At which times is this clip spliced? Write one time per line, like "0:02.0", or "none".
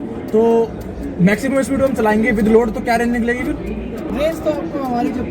0:04.0